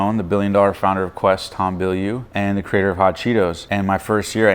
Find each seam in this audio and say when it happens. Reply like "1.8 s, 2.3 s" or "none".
2.2 s, 3.6 s